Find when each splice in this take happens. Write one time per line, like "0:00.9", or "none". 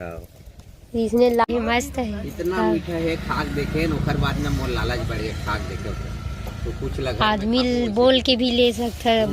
0:01.4